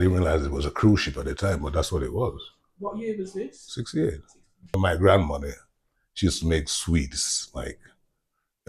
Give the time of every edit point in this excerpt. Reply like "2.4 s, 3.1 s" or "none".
4.8 s